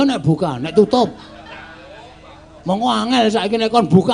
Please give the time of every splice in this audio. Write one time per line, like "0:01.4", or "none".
none